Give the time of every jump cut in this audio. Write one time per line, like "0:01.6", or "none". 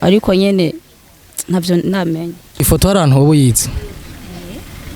0:02.5